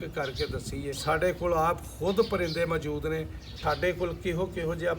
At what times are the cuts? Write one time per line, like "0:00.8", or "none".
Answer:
0:00.9
0:03.5